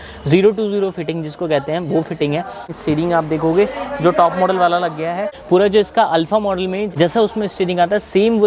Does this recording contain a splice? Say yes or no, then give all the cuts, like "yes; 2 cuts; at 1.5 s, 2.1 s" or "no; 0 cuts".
yes; 3 cuts; at 2.7 s, 5.3 s, 6.9 s